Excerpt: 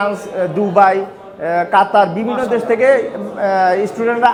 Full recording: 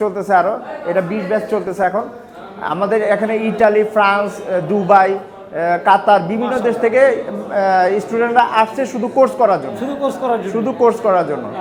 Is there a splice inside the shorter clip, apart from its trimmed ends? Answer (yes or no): no